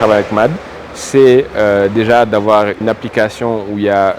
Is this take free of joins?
yes; 0 cuts

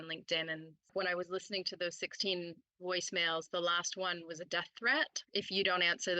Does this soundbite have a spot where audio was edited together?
yes; 2 cuts; at 0.9 s, 5.2 s

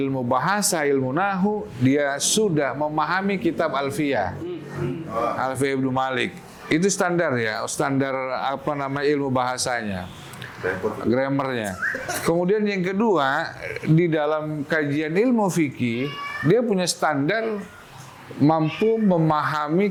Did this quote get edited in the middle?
no; 0 cuts

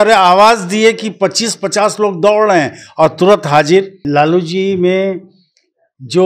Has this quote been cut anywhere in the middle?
yes; 1 cut; at 4.0 s

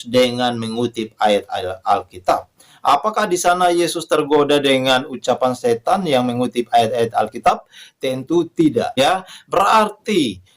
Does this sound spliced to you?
yes; 1 cut; at 8.9 s

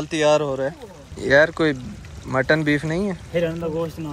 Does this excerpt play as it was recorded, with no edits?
no; 1 cut; at 1.0 s

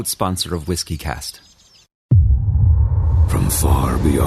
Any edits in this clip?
yes; 1 cut; at 2.0 s

